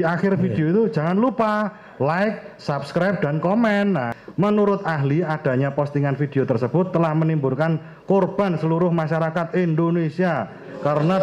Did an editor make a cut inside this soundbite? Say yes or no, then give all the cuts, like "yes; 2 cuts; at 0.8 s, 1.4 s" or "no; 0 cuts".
yes; 1 cut; at 4.2 s